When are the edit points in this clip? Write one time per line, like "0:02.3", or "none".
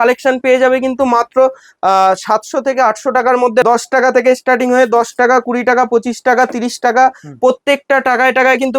0:03.6